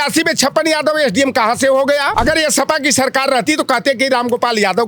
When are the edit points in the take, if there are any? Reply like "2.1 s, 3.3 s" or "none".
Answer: 2.1 s